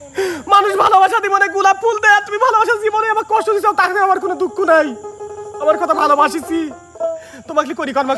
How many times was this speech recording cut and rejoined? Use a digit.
0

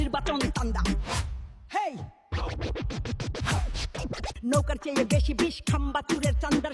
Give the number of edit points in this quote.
1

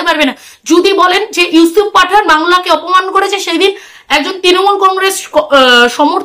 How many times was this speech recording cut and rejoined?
0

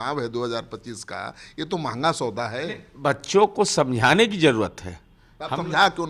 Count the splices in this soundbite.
0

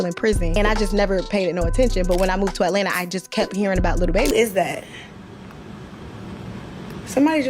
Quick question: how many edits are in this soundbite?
1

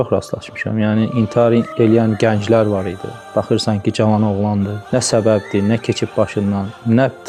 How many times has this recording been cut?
0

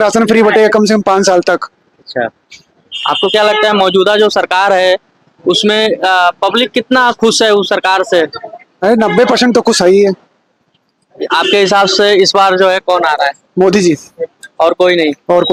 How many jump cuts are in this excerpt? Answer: 0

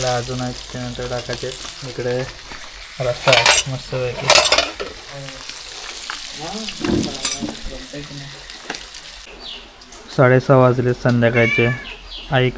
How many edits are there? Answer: 1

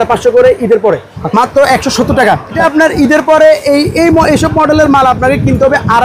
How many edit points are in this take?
2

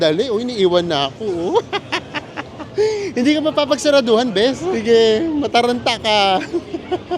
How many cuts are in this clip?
1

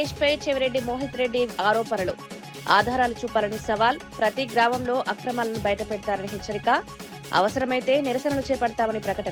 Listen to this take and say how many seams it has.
0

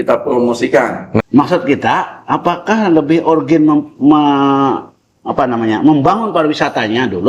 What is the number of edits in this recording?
1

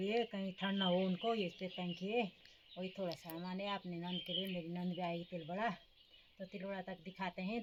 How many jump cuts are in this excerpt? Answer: 0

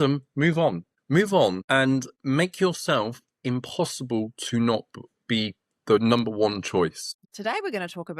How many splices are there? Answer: 1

